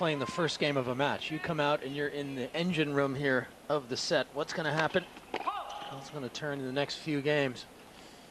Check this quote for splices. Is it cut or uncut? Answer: uncut